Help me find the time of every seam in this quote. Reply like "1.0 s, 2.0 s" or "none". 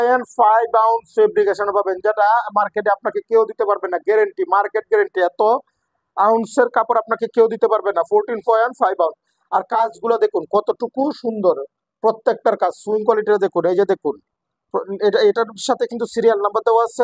none